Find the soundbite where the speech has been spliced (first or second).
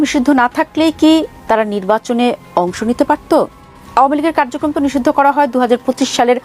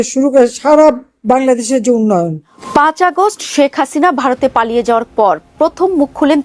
second